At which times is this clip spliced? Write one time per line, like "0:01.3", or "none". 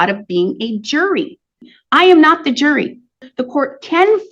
0:01.6
0:03.3